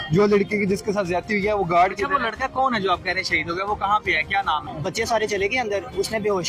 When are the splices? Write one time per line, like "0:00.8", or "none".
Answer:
0:04.8